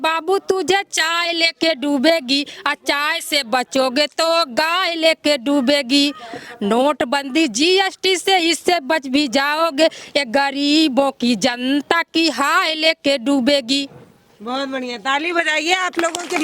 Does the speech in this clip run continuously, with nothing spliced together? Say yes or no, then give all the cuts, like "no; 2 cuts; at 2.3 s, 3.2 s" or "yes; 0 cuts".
yes; 0 cuts